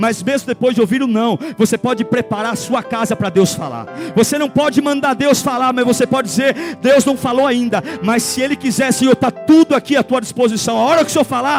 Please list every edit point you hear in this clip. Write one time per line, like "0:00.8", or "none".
none